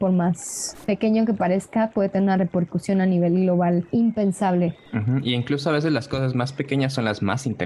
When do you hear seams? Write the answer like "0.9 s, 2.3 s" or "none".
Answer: 3.9 s, 4.8 s